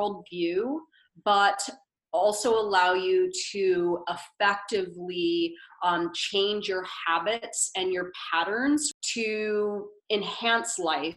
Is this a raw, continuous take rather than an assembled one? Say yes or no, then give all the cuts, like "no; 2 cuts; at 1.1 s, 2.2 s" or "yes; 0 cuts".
no; 1 cut; at 8.9 s